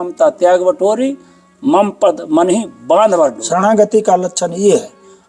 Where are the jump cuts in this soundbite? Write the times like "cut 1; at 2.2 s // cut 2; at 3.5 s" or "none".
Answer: cut 1; at 3.4 s